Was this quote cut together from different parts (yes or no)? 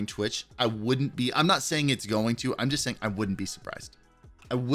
no